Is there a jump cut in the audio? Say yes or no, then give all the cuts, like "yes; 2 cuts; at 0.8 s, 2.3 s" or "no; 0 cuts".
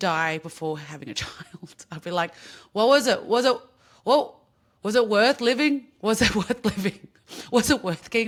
no; 0 cuts